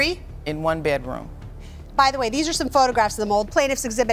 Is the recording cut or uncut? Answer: uncut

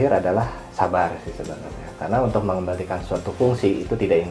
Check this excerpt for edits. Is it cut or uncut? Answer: uncut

